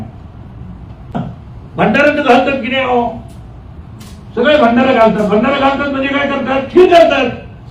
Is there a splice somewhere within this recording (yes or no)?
yes